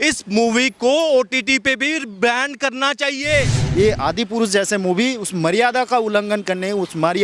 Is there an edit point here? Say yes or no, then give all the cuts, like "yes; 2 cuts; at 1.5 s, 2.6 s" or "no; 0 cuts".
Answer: yes; 1 cut; at 3.6 s